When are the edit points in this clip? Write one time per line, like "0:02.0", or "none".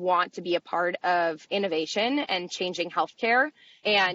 none